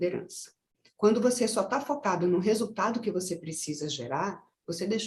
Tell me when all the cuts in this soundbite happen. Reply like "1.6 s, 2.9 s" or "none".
none